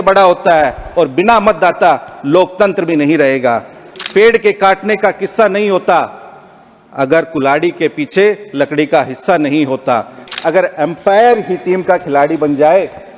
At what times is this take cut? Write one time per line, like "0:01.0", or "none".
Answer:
0:04.0
0:10.3